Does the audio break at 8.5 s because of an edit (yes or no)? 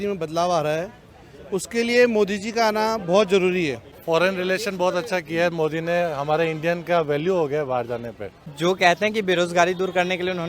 yes